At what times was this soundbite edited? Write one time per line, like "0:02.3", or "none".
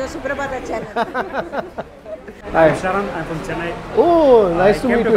0:02.4

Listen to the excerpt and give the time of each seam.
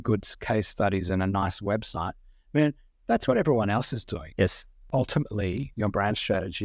0:04.7
0:05.7

